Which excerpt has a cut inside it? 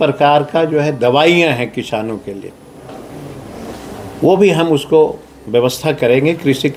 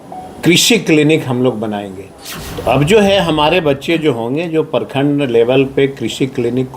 second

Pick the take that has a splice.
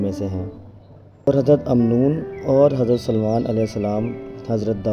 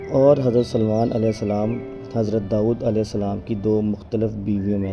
first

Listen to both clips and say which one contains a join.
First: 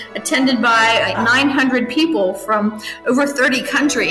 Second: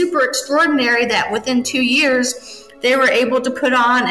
first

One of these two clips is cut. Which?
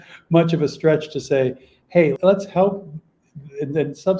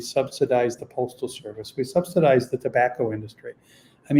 first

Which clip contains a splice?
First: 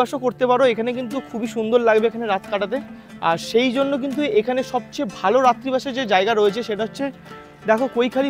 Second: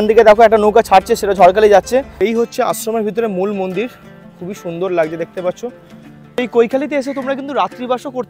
second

